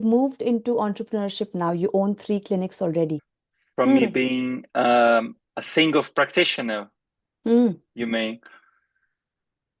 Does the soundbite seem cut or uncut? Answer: uncut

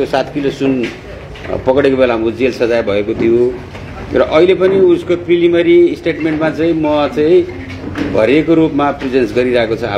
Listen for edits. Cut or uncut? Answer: uncut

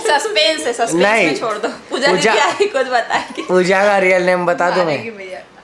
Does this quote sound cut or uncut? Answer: uncut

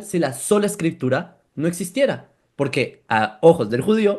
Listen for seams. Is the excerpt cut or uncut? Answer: cut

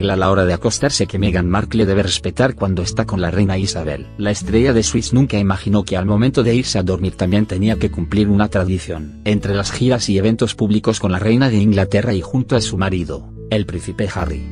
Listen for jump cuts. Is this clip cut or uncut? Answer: uncut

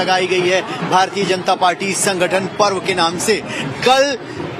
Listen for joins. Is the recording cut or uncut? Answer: uncut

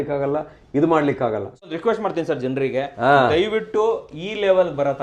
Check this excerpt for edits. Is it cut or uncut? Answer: cut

